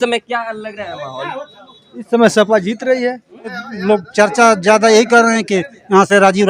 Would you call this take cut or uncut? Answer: cut